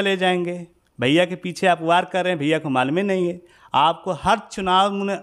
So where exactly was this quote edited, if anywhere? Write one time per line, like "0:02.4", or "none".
none